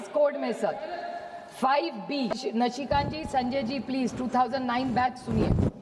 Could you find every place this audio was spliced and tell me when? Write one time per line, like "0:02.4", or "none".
0:02.4